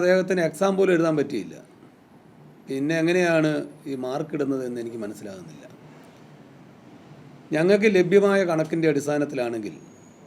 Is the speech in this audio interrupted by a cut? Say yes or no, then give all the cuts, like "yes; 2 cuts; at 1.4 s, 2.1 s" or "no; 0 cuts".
no; 0 cuts